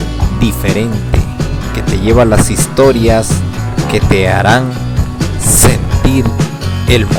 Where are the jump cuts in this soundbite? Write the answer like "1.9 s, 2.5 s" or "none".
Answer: none